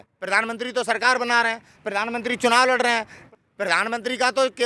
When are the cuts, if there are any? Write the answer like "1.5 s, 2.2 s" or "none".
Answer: 3.2 s